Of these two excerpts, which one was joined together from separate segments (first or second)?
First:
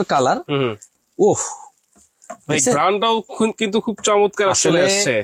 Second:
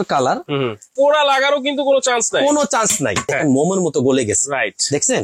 second